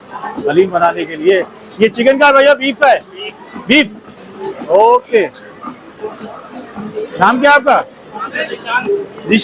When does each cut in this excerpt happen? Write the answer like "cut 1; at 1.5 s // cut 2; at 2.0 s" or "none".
none